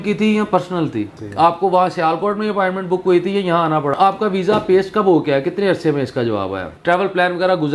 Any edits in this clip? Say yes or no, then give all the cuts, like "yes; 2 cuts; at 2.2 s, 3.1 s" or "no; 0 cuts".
yes; 3 cuts; at 1.2 s, 3.9 s, 6.7 s